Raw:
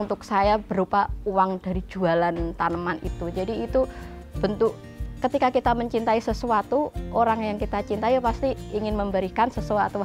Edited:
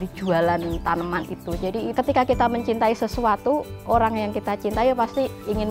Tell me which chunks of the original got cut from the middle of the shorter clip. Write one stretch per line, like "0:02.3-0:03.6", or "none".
0:03.7-0:05.2